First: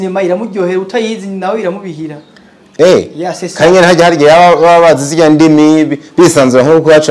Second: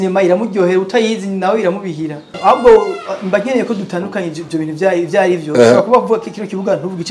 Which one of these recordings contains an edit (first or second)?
second